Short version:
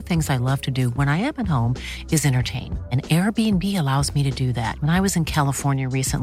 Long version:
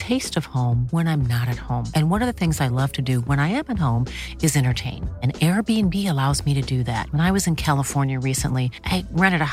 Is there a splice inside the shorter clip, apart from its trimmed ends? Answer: no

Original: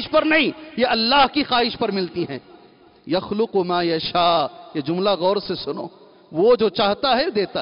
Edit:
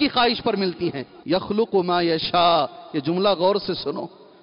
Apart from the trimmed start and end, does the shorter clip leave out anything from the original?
yes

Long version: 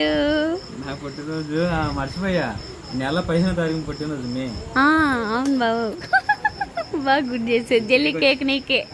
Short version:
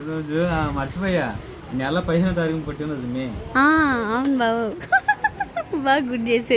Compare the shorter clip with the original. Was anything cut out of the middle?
no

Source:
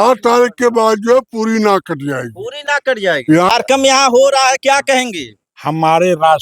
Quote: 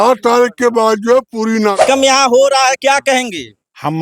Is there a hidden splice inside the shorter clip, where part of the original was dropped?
yes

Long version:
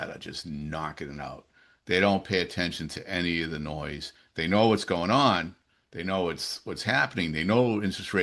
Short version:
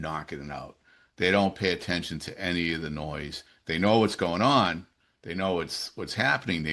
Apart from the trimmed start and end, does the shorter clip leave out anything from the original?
no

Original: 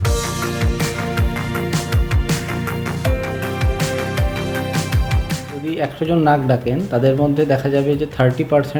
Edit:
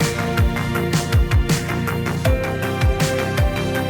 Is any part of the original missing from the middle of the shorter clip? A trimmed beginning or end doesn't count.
no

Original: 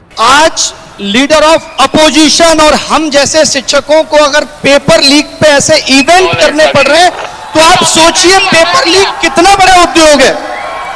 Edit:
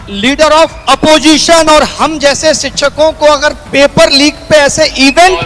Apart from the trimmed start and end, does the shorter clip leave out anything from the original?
no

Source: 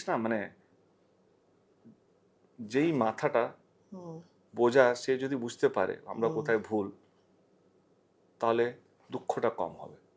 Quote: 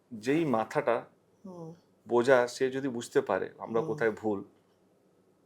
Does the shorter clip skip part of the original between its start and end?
no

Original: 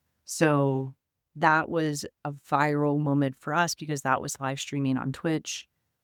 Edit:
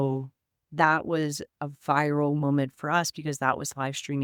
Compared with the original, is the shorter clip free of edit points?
yes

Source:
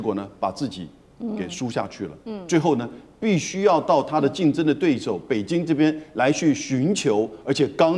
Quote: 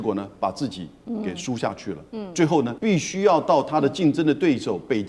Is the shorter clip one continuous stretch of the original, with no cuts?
no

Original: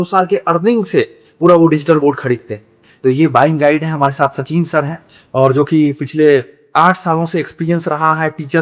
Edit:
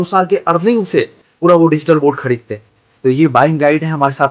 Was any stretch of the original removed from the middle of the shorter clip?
no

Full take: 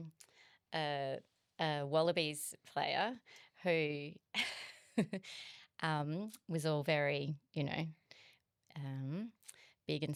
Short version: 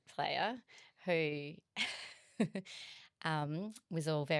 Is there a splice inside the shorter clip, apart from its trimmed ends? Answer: no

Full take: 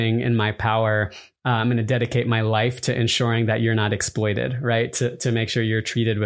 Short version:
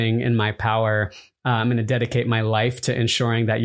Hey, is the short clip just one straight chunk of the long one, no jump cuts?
yes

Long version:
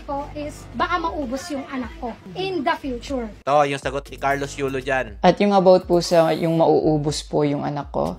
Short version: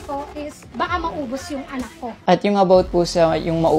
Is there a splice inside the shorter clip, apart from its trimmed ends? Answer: yes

